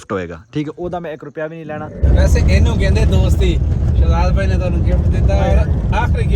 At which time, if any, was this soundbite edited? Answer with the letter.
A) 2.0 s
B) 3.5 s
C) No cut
A